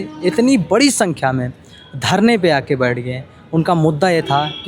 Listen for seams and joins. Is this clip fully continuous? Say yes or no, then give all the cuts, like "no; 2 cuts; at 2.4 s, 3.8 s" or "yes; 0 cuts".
yes; 0 cuts